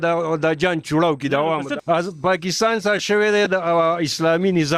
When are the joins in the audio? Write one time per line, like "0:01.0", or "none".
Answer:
0:01.7